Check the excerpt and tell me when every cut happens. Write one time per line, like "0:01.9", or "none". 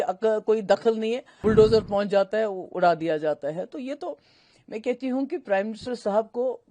0:01.3